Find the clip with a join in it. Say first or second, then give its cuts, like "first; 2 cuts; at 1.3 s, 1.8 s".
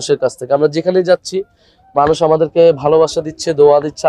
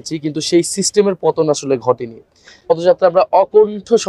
second; 1 cut; at 2.7 s